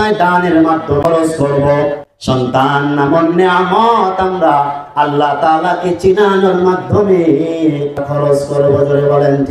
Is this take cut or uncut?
cut